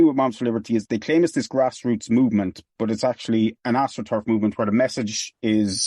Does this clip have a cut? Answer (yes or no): no